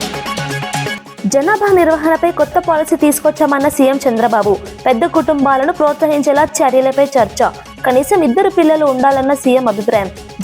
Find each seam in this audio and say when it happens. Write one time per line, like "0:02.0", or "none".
0:01.0